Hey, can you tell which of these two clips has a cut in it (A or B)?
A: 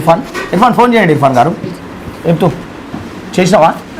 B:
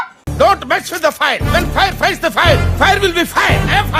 A